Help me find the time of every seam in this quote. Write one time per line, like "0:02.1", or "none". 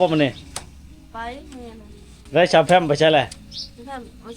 0:02.1